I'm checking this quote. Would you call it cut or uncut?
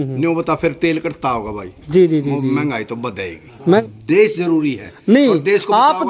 cut